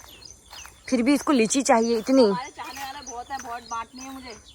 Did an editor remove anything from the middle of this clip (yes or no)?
no